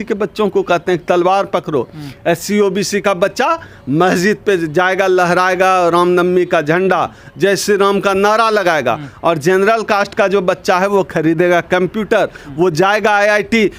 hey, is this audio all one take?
yes; 0 cuts

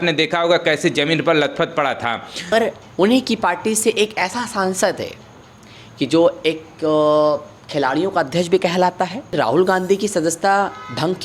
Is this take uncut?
no; 2 cuts; at 2.5 s, 9.4 s

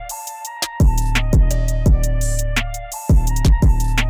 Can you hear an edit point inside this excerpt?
no; 0 cuts

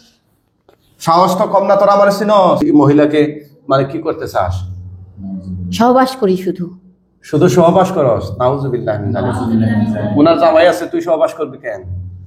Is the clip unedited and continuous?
no; 1 cut; at 2.6 s

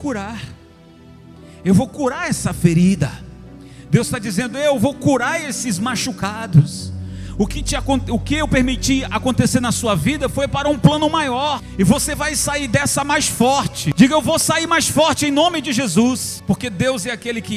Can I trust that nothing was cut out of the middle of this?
no; 3 cuts; at 11.7 s, 13.8 s, 16.3 s

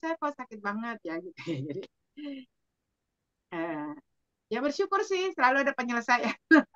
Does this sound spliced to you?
no; 0 cuts

